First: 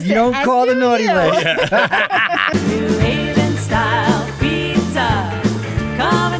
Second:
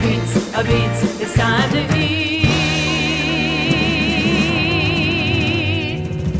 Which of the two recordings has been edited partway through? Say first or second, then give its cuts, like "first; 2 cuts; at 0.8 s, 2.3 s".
first; 1 cut; at 2.5 s